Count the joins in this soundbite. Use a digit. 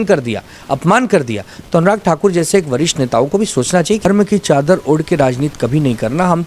1